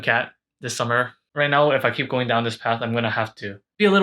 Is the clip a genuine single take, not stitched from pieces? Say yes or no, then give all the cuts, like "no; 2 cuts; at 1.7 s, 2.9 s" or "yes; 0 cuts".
no; 1 cut; at 1.2 s